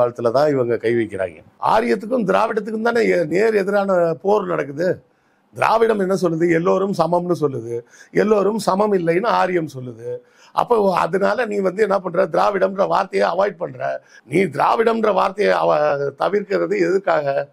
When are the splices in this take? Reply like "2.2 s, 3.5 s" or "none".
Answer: 1.5 s, 14.1 s